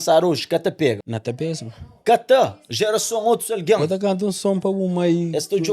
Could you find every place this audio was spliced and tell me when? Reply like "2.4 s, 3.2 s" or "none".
1.1 s